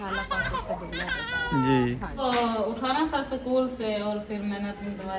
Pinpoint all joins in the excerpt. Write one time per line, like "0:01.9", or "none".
0:02.1